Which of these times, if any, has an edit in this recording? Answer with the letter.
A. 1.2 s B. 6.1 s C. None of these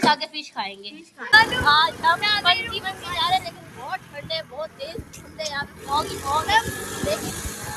A